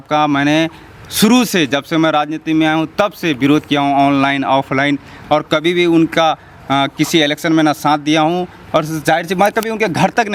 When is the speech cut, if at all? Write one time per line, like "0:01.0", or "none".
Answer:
none